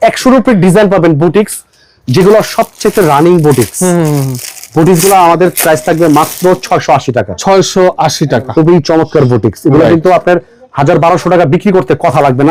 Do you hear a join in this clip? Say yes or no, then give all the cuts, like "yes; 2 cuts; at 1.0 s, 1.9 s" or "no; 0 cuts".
no; 0 cuts